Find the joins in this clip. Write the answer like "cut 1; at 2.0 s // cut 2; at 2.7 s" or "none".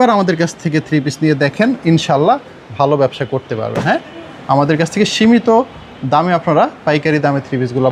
none